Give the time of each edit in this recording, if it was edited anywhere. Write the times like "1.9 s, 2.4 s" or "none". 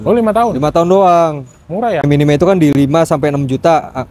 2.0 s